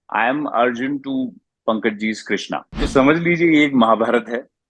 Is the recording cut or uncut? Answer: cut